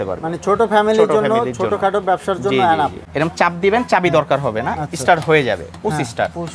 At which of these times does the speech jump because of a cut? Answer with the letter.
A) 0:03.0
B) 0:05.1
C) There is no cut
A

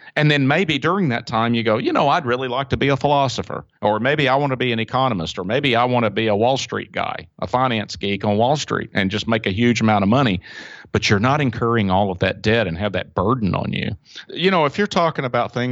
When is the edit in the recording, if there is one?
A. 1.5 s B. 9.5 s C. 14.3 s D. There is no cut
C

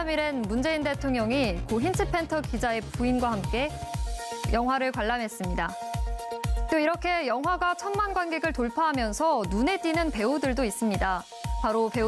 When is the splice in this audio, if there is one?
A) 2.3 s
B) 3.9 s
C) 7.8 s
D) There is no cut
B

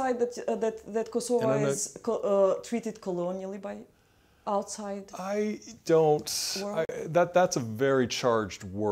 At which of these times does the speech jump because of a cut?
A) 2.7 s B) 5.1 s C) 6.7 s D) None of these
D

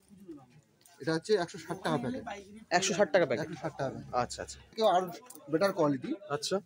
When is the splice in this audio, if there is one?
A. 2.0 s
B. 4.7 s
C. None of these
B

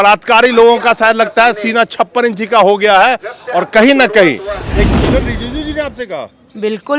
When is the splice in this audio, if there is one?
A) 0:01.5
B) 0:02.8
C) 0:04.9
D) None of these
C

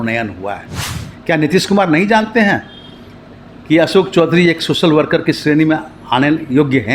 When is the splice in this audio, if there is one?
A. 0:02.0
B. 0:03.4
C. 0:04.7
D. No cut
D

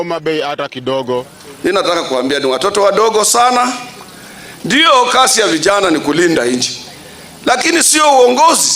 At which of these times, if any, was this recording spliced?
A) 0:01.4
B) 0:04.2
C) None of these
A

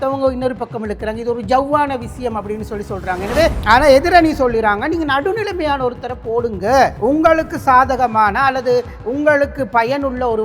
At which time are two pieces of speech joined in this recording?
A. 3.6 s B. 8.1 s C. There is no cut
A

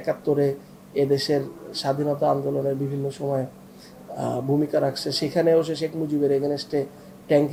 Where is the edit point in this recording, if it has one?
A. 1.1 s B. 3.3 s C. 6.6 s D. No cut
D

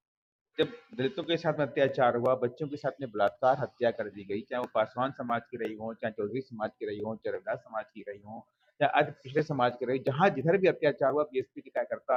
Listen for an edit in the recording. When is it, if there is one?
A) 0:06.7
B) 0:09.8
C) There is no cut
C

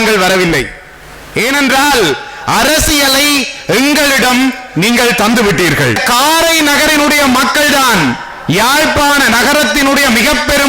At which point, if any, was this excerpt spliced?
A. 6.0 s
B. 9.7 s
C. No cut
A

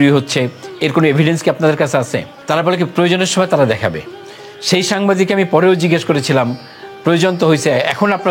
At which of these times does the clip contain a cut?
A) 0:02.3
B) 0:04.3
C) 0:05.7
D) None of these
A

